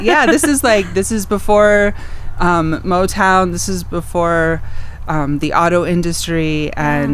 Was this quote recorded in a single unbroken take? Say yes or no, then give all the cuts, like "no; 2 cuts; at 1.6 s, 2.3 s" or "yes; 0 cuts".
yes; 0 cuts